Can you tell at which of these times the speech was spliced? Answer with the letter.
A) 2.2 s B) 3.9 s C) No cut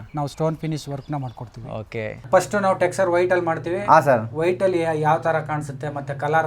A